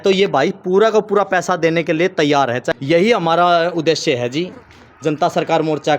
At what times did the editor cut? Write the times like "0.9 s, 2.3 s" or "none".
2.7 s